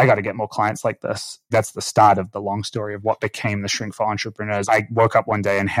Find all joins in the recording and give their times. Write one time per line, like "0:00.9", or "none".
0:01.5
0:04.6